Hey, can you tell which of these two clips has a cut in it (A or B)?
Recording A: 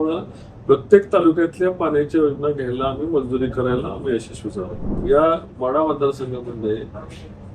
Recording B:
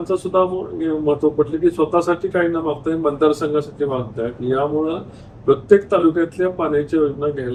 A